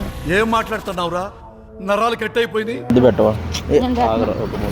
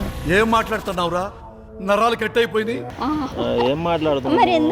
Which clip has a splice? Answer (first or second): first